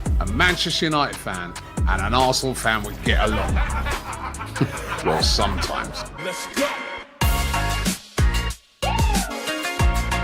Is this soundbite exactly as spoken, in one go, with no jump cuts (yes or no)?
no